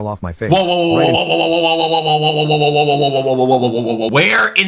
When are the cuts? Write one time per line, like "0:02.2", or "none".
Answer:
none